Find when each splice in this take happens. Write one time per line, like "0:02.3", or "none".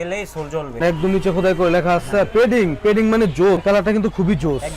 0:00.8
0:03.6